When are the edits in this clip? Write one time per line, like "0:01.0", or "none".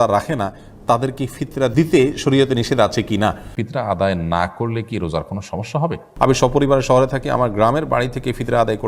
0:01.7
0:03.5
0:06.0